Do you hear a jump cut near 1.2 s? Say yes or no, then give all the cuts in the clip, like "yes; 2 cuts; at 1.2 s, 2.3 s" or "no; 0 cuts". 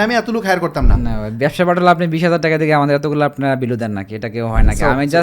no; 0 cuts